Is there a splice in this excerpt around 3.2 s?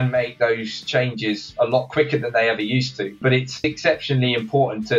yes; 1 cut; at 3.2 s

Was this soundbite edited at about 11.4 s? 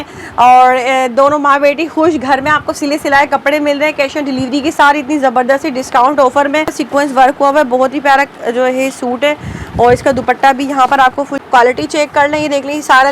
yes; 2 cuts; at 6.8 s, 11.4 s

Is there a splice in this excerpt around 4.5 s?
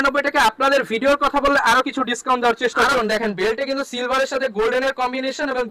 no; 1 cut; at 2.9 s

